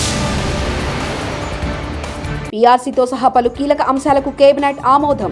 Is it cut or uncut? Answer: uncut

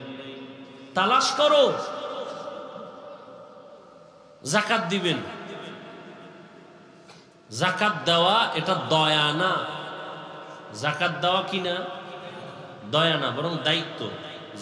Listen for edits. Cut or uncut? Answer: cut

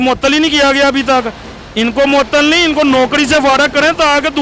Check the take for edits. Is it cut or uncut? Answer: uncut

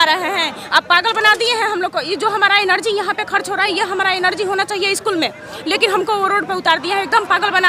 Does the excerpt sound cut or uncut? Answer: uncut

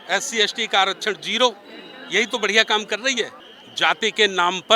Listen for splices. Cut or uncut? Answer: cut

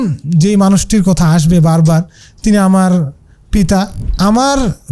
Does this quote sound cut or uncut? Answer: cut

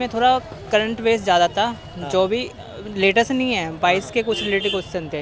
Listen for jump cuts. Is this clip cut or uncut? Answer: uncut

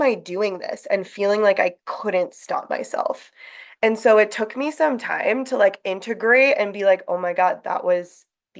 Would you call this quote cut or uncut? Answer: uncut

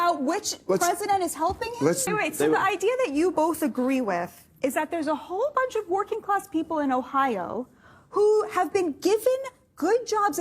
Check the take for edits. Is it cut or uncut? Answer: cut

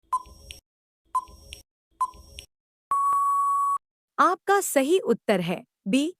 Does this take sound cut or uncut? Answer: cut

